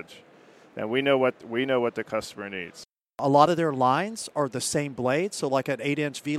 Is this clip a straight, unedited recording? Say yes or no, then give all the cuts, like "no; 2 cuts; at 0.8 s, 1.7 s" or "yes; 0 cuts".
no; 1 cut; at 3.2 s